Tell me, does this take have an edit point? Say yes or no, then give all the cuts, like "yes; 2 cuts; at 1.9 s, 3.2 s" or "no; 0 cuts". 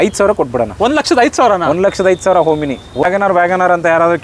yes; 1 cut; at 3.0 s